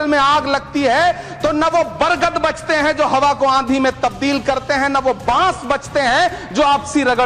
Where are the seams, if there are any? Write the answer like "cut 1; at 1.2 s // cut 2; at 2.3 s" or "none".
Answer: none